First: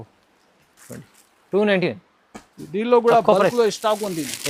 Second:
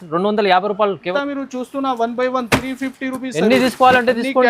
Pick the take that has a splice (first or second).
second